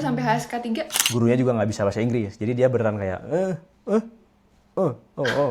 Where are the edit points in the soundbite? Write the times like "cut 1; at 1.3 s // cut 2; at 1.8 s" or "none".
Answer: cut 1; at 1.0 s